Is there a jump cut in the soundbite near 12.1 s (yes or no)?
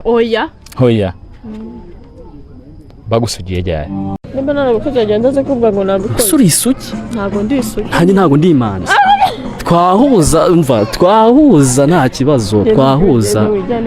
no